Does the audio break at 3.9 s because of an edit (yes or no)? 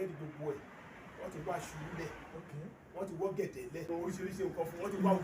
yes